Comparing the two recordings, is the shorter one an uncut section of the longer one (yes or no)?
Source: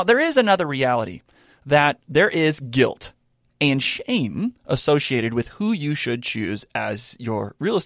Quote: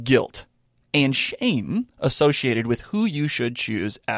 yes